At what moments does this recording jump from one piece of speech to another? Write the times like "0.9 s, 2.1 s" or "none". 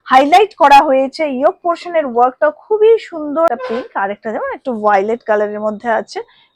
3.5 s